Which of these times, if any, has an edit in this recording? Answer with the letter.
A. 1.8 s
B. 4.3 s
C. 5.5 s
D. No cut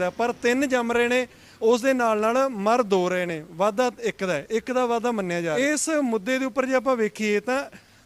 C